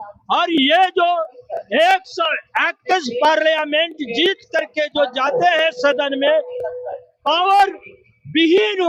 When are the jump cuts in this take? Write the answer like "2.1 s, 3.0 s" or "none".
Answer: none